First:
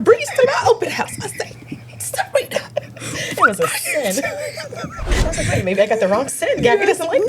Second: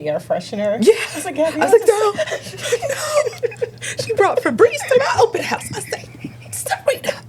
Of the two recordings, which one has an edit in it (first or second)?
first